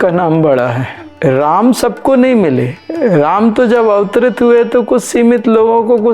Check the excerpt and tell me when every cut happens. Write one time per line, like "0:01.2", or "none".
0:01.0